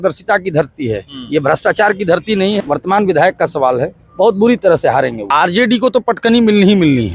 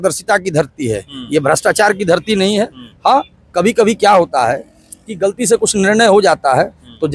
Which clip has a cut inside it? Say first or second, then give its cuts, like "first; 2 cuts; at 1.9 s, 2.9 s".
first; 2 cuts; at 2.6 s, 5.2 s